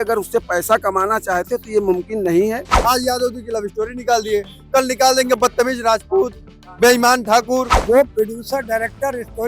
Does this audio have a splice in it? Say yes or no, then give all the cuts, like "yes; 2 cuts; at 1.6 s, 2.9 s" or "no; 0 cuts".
yes; 2 cuts; at 2.7 s, 7.7 s